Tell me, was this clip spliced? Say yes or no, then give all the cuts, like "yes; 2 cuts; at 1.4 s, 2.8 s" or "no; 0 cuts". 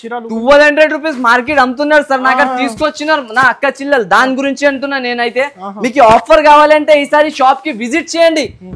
no; 0 cuts